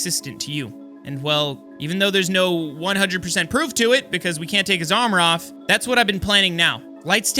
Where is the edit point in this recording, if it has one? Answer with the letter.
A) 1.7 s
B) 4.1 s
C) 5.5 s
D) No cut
A